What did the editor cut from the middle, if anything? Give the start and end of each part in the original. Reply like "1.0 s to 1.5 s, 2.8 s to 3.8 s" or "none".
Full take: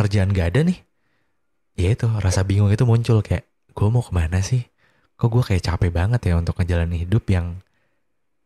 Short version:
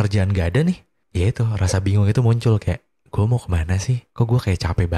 1.0 s to 1.6 s, 4.7 s to 5.1 s